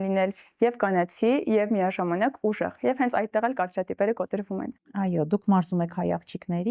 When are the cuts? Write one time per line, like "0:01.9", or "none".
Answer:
none